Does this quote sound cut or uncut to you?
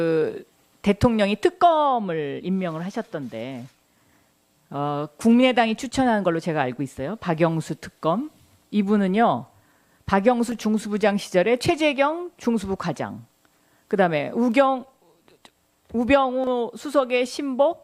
uncut